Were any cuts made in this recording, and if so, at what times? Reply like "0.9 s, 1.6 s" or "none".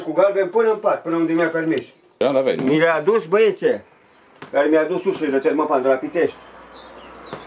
2.2 s